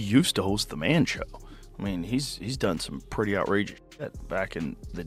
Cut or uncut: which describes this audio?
uncut